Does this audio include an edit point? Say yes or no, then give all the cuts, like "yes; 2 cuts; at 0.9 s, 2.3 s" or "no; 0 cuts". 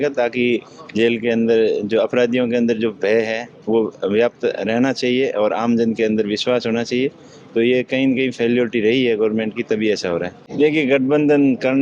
yes; 1 cut; at 10.4 s